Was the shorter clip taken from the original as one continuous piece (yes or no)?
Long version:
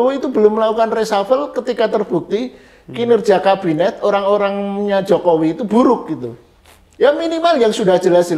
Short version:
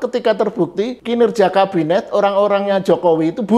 no